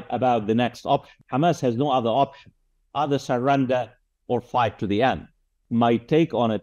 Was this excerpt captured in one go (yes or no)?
no